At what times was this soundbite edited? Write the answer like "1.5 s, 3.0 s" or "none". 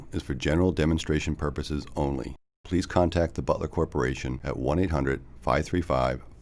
none